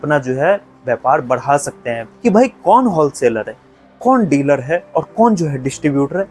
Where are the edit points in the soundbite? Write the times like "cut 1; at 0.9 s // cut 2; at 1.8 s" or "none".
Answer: cut 1; at 2.1 s